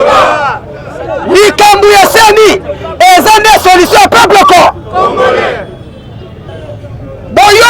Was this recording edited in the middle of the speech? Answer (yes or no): yes